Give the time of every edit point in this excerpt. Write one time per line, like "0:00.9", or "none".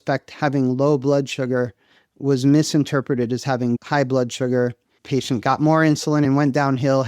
0:03.8
0:05.0
0:06.3